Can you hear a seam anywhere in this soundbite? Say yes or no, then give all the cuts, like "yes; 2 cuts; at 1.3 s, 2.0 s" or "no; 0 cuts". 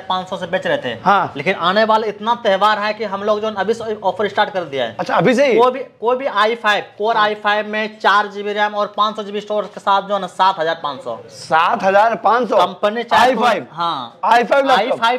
no; 0 cuts